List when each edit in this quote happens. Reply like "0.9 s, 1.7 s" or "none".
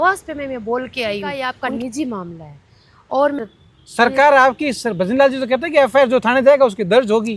1.5 s, 3.4 s